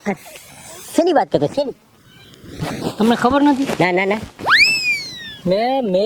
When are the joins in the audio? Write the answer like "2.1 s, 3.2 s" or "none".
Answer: none